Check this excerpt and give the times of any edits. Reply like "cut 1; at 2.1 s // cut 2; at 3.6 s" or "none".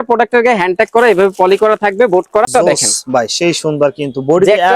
cut 1; at 2.4 s